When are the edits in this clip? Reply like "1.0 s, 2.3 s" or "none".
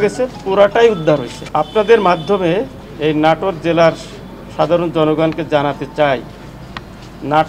none